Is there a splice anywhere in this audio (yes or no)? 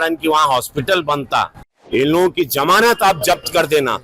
yes